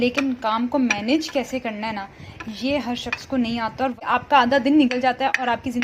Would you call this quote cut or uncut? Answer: cut